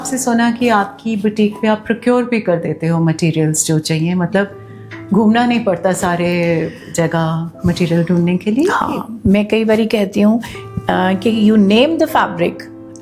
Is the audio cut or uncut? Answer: uncut